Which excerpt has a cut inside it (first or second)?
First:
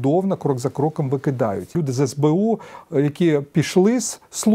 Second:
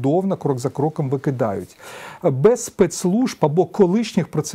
first